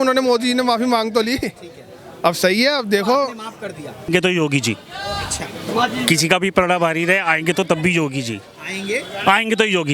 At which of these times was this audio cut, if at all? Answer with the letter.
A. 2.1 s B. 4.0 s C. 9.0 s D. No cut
B